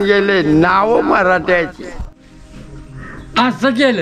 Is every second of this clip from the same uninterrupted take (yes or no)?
no